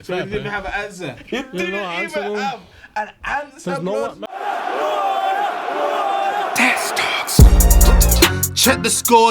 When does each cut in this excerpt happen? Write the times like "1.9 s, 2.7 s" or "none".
4.2 s